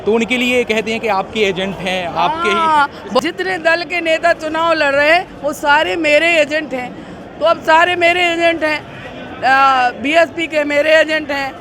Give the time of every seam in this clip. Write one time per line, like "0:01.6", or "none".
0:03.2